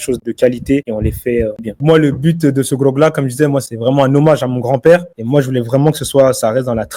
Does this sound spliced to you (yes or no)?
yes